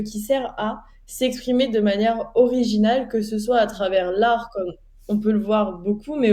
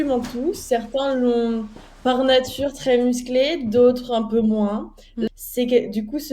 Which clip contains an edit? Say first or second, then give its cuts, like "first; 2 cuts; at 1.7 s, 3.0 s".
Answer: second; 1 cut; at 5.3 s